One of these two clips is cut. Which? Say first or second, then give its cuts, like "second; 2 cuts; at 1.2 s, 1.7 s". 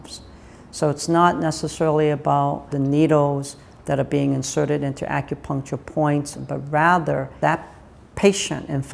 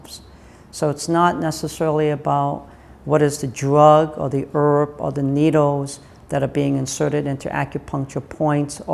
first; 3 cuts; at 2.7 s, 6.3 s, 7.3 s